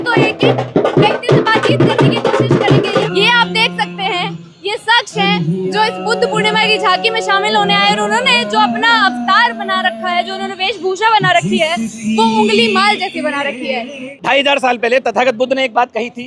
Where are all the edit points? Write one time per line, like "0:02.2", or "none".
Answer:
0:03.0
0:14.0